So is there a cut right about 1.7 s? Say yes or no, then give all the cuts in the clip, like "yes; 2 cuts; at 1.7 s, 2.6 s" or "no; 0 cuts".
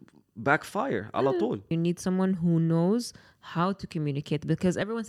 yes; 1 cut; at 1.7 s